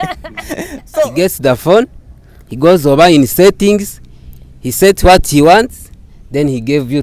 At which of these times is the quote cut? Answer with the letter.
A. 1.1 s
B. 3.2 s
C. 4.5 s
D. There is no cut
A